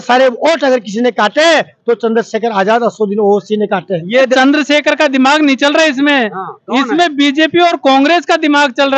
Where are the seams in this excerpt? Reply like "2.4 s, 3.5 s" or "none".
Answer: 4.3 s